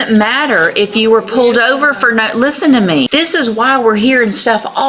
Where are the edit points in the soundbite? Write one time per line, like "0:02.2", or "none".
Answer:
0:03.1